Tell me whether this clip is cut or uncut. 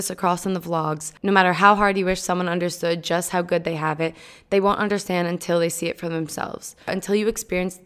cut